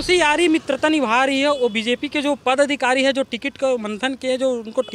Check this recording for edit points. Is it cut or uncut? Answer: uncut